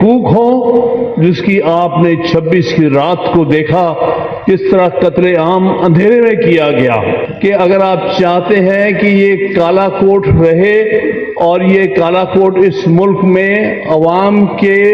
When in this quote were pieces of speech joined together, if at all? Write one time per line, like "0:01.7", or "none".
0:07.3